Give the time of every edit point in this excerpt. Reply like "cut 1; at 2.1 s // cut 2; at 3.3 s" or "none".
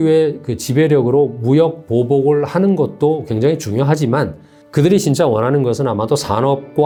none

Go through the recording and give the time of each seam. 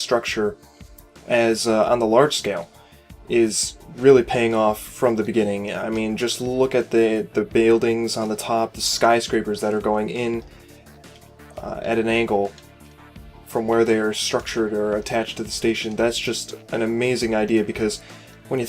cut 1; at 1.2 s

